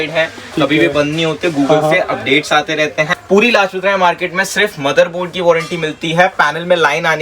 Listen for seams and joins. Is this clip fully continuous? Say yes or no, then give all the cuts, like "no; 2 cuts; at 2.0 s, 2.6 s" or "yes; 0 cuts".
no; 1 cut; at 3.1 s